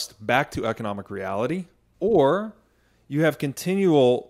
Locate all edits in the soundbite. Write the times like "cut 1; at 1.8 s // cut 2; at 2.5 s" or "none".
cut 1; at 1.8 s